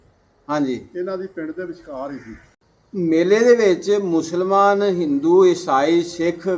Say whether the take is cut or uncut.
cut